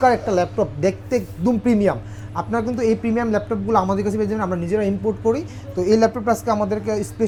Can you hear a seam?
no; 0 cuts

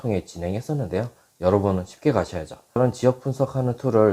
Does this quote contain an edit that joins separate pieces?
yes; 1 cut; at 2.8 s

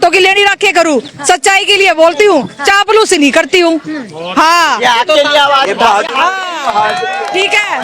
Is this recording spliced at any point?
no; 0 cuts

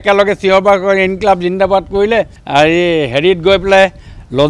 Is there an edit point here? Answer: no; 0 cuts

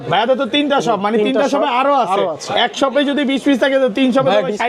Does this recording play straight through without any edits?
yes; 0 cuts

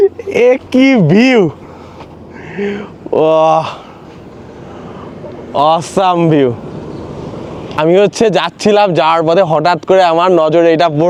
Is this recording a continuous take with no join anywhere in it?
yes; 0 cuts

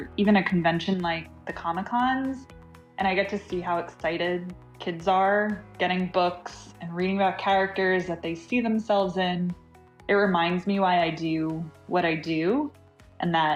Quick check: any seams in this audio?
no; 0 cuts

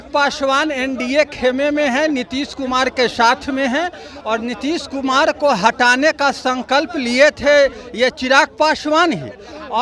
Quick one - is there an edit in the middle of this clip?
no; 0 cuts

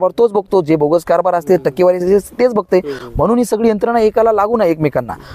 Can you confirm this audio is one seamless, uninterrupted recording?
yes; 0 cuts

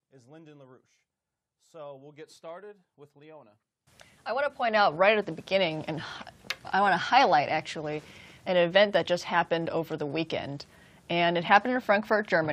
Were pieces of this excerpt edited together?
no; 0 cuts

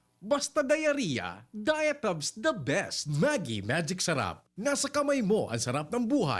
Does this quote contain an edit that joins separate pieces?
yes; 1 cut; at 3.1 s

